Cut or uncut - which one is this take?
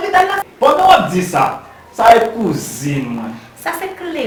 uncut